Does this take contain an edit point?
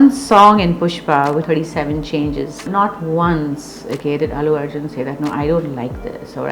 yes; 2 cuts; at 1.4 s, 2.7 s

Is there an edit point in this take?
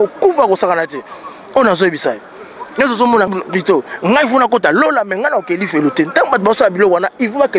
yes; 1 cut; at 3.3 s

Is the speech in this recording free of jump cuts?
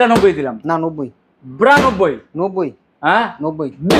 yes; 0 cuts

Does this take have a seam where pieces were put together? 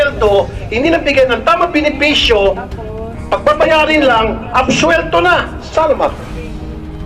no; 0 cuts

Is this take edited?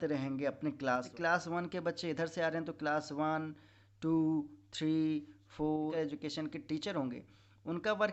yes; 2 cuts; at 1.1 s, 5.9 s

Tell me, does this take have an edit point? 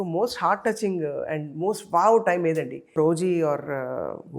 yes; 1 cut; at 3.0 s

